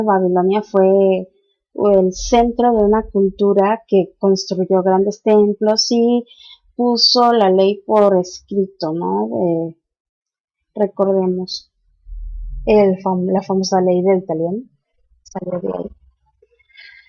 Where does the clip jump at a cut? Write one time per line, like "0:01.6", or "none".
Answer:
0:08.0